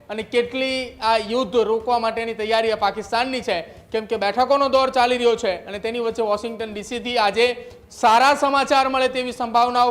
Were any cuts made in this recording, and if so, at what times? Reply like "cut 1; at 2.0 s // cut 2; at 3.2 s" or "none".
none